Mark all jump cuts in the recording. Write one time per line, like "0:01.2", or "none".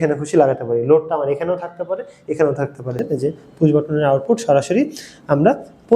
0:03.1